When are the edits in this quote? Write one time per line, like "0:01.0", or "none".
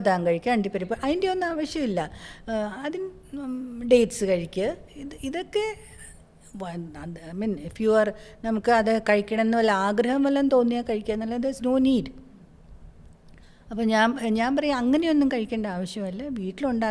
none